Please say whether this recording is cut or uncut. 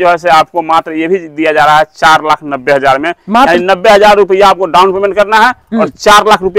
uncut